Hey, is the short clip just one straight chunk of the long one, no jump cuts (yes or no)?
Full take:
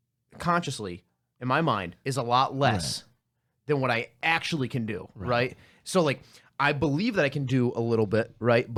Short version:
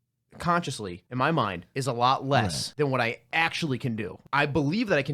no